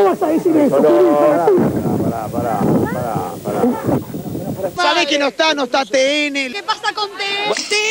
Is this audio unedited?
yes; 0 cuts

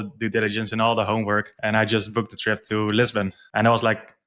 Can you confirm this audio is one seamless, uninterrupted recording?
no; 2 cuts; at 1.5 s, 3.4 s

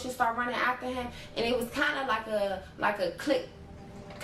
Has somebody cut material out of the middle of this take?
no; 0 cuts

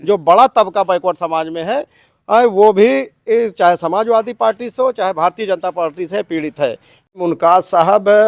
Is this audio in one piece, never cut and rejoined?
no; 1 cut; at 7.1 s

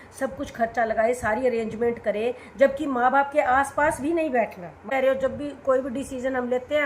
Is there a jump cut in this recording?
yes; 1 cut; at 4.8 s

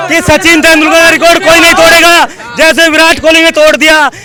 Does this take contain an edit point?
no; 0 cuts

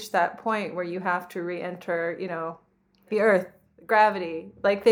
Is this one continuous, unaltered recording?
no; 1 cut; at 3.1 s

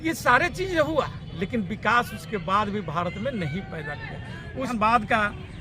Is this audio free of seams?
no; 1 cut; at 4.7 s

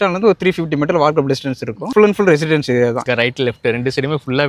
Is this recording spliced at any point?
yes; 2 cuts; at 1.8 s, 3.1 s

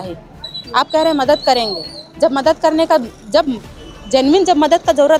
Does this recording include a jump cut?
no; 0 cuts

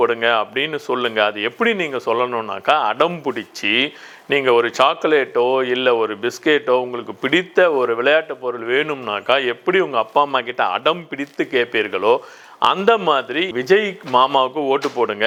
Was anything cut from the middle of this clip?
no; 0 cuts

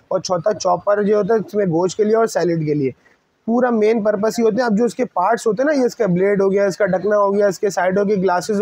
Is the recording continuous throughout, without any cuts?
yes; 0 cuts

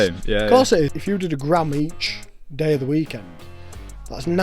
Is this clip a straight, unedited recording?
no; 1 cut; at 1.0 s

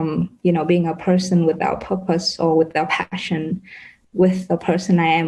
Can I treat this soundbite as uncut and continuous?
no; 1 cut; at 4.0 s

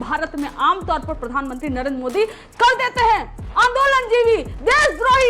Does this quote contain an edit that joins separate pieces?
no; 0 cuts

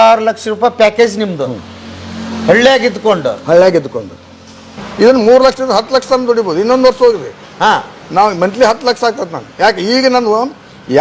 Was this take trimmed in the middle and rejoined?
yes; 1 cut; at 4.8 s

